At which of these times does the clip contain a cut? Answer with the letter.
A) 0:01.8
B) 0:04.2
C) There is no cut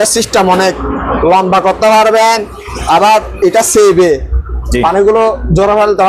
C